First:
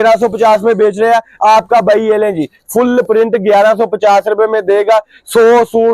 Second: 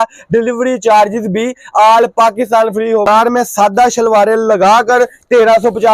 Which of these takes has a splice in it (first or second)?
second